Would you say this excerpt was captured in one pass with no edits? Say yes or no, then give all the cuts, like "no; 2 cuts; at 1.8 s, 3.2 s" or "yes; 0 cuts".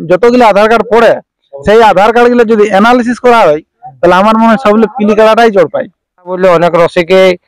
no; 1 cut; at 6.4 s